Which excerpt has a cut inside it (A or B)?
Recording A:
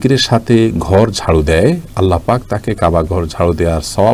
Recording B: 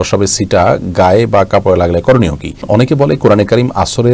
B